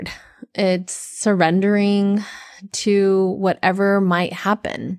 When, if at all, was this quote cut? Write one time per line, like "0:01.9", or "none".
none